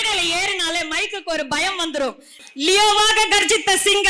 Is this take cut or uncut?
cut